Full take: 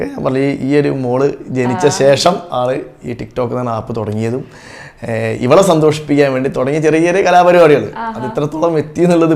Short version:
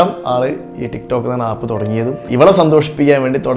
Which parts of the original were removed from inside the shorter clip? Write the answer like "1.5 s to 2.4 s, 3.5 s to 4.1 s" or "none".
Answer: 4.5 s to 5.4 s